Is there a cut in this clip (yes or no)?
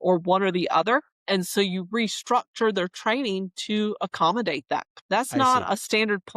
yes